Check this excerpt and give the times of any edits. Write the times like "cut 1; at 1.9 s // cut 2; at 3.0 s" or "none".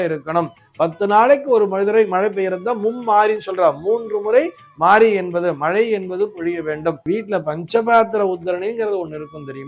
cut 1; at 7.0 s